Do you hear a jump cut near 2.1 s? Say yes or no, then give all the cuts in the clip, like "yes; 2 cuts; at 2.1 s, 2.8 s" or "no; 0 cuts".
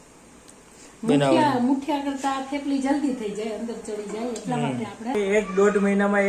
no; 1 cut; at 5.1 s